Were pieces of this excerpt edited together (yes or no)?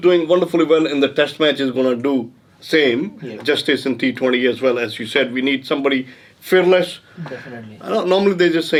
no